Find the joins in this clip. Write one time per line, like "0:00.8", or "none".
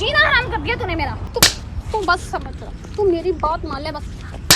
0:01.2